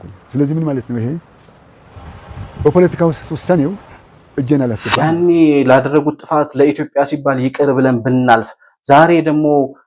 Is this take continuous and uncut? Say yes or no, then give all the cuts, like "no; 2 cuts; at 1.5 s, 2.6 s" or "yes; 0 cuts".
no; 1 cut; at 4.9 s